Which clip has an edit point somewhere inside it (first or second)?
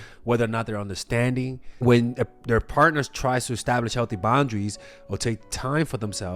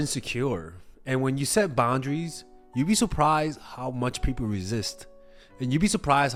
first